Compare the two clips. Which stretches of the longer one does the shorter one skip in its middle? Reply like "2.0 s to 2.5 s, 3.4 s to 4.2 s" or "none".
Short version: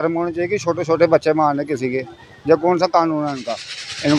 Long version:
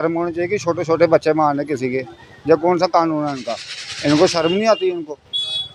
none

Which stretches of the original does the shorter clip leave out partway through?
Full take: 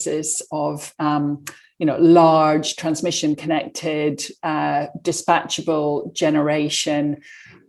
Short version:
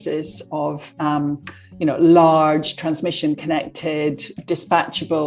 4.4 s to 4.9 s

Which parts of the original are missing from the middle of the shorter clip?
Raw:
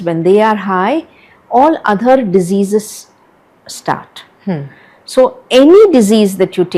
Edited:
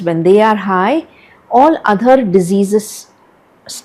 none

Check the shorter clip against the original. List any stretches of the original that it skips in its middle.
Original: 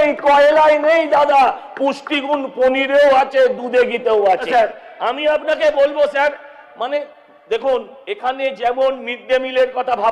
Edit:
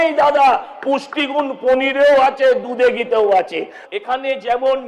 4.5 s to 7.8 s

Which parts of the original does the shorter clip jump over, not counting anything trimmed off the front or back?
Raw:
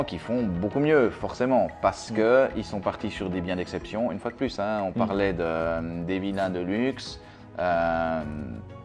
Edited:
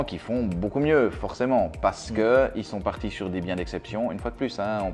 none

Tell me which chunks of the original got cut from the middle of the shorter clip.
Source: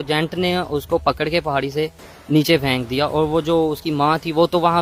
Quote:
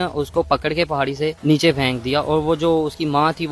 1.9 s to 2.2 s

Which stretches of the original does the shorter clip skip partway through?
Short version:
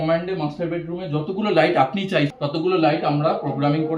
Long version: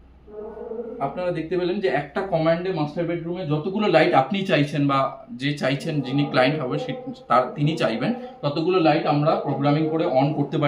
4.7 s to 8.4 s

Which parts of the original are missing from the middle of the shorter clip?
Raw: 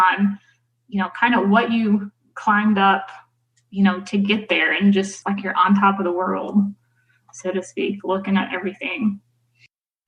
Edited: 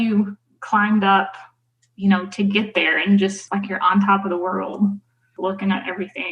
7.1 s to 8.0 s

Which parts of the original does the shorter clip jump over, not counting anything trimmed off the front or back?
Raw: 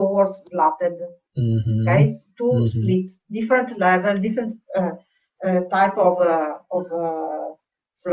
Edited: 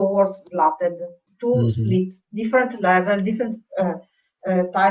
1.3 s to 2.2 s

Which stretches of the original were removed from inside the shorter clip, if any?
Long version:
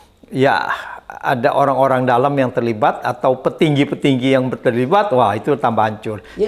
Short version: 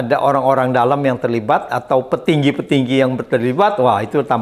none

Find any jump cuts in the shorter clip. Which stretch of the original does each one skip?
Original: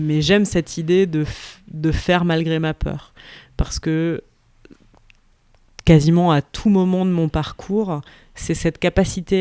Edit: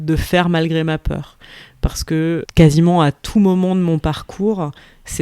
4.2 s to 5.8 s

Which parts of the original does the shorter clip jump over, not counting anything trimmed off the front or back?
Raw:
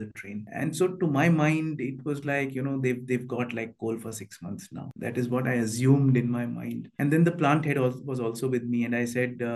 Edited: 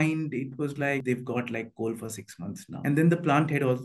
2.5 s to 3.0 s, 4.7 s to 6.8 s

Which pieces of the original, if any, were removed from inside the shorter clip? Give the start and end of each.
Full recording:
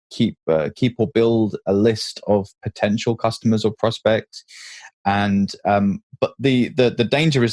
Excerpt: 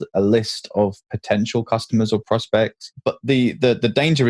4.4 s to 6.1 s

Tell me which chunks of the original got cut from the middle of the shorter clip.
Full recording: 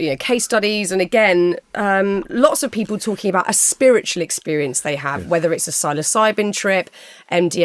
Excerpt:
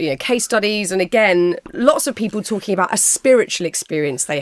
1.7 s to 2.3 s

